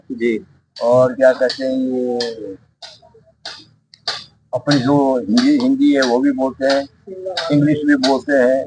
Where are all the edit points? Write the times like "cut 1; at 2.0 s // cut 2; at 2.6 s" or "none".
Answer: none

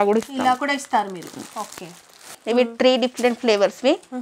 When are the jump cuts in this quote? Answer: cut 1; at 2.4 s

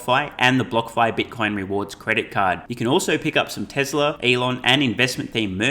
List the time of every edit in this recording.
cut 1; at 4.2 s

